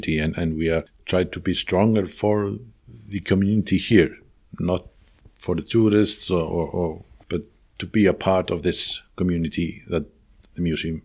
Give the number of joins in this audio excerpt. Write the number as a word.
one